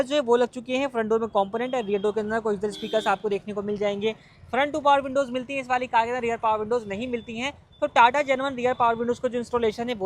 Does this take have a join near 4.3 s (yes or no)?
no